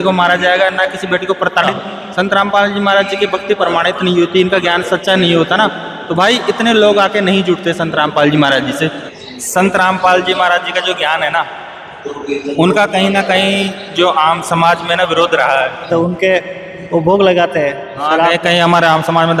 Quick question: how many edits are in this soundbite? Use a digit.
3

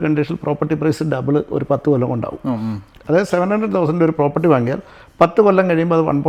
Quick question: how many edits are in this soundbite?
0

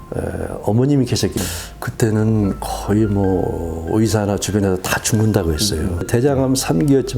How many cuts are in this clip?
1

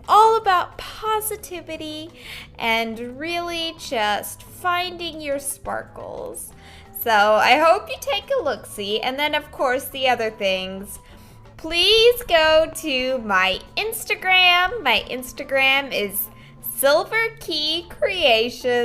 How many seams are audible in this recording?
0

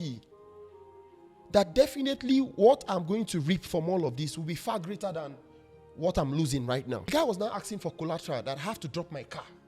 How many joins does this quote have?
1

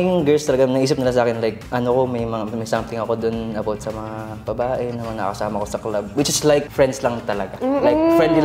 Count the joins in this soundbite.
2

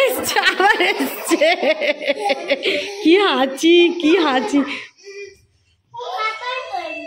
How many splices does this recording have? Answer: 0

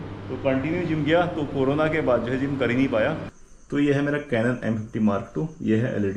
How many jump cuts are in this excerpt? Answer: 1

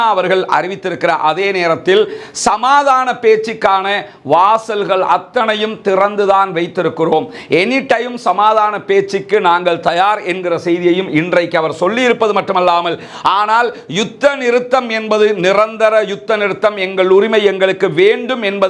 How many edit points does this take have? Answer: 0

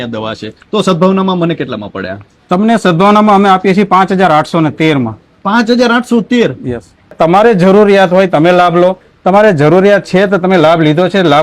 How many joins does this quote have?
1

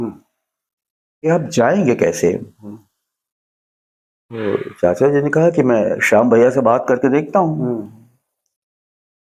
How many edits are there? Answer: 0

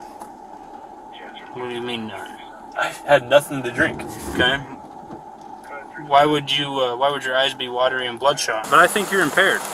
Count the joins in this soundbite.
1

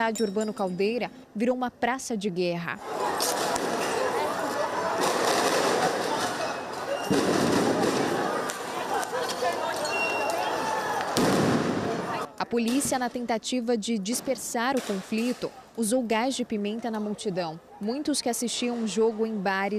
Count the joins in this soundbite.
0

